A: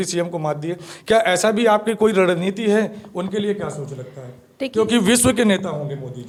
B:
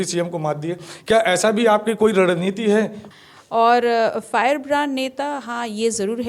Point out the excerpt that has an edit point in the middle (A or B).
B